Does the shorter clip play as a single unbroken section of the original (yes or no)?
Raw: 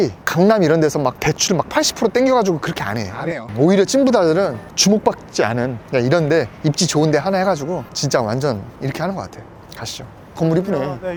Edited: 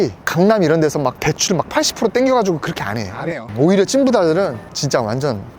no